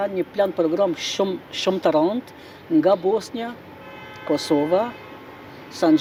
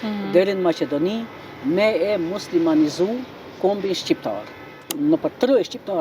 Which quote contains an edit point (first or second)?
second